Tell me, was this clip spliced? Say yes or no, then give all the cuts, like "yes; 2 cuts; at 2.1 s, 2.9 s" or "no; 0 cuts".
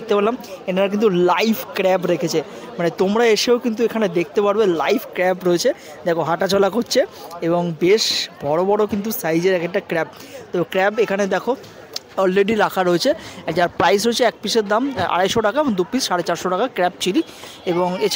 no; 0 cuts